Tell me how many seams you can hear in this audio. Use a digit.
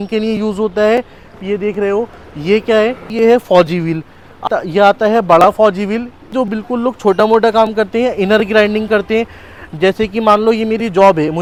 0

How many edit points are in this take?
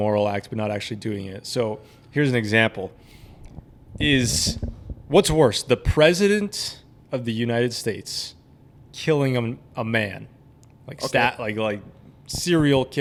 0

